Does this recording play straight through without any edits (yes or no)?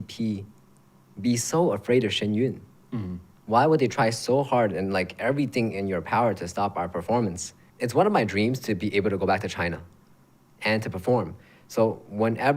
no